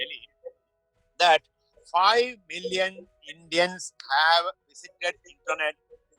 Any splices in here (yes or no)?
no